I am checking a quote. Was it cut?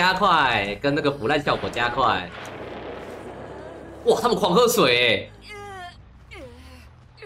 no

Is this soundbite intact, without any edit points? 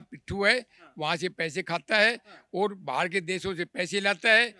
yes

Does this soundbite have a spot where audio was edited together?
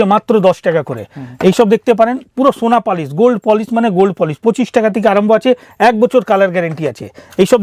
no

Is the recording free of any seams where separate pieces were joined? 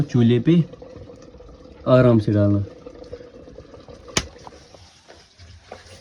no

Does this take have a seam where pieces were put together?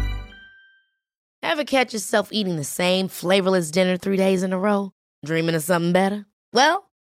yes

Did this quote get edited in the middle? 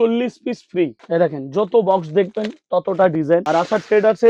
yes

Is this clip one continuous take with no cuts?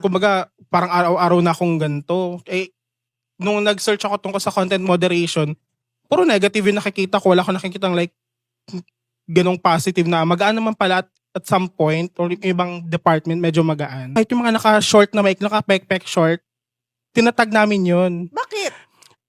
no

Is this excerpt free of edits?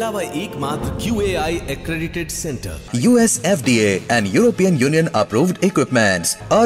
yes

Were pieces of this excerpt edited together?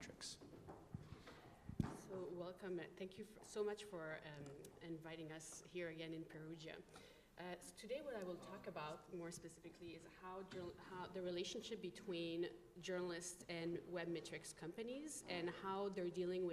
yes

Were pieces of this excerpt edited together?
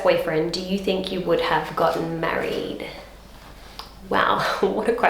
no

